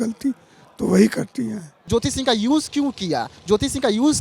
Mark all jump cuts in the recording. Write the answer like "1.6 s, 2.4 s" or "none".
1.8 s